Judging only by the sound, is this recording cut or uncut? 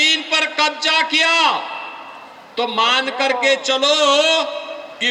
uncut